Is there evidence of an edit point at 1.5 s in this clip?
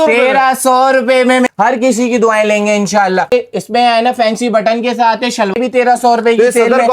yes; 3 cuts; at 1.5 s, 3.3 s, 5.5 s

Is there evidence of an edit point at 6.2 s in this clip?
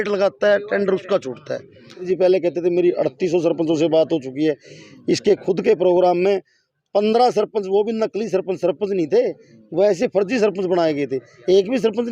no; 1 cut; at 2.1 s

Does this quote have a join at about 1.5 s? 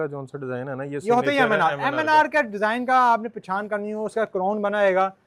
no; 0 cuts

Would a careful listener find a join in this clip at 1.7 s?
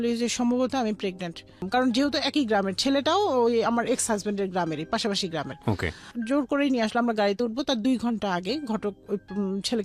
yes; 1 cut; at 1.7 s

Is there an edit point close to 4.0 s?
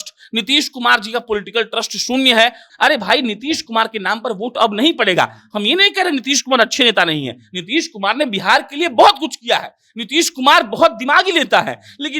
no; 1 cut; at 2.6 s

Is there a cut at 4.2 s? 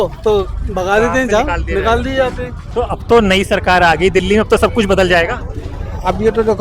no; 1 cut; at 2.6 s

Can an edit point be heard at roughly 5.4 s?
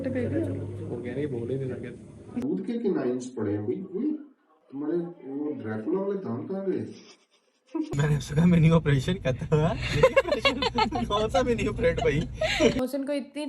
no; 3 cuts; at 2.4 s, 7.9 s, 12.8 s

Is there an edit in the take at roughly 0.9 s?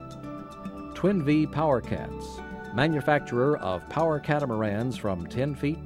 no; 0 cuts

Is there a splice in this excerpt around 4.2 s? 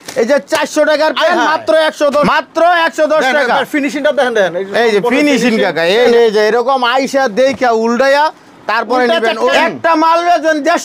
no; 3 cuts; at 2.2 s, 6.1 s, 9.5 s

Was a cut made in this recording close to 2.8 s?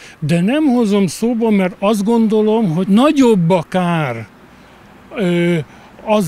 yes; 1 cut; at 2.8 s

